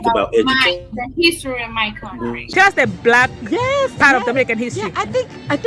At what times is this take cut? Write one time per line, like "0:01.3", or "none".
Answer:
0:02.5